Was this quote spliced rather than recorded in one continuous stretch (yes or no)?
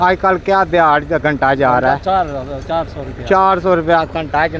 no